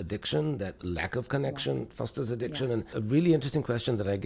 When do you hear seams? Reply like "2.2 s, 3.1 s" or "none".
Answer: 2.9 s

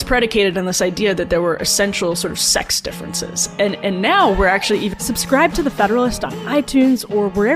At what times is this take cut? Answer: 5.0 s

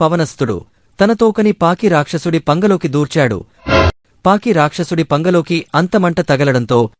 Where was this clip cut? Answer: 3.8 s

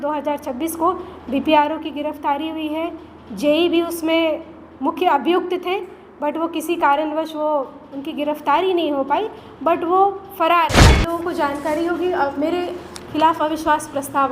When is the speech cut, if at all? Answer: 11.0 s

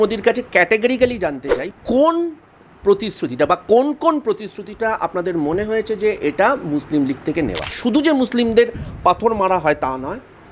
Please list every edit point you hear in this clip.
1.5 s, 7.7 s

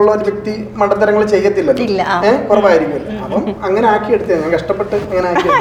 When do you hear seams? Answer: none

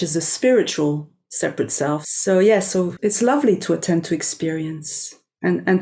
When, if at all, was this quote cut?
2.1 s, 2.9 s

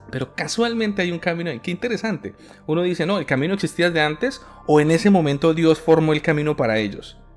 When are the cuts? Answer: none

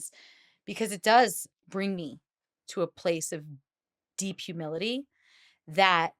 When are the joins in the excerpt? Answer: 1.4 s

